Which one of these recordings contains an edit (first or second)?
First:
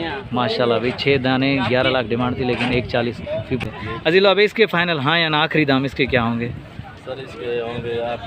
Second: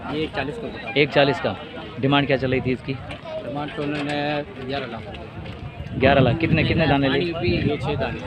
first